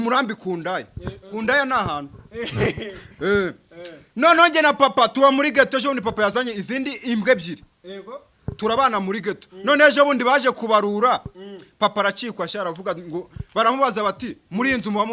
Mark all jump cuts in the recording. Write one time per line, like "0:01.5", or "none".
none